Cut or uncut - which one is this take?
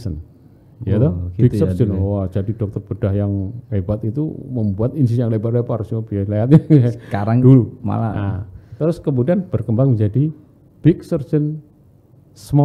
uncut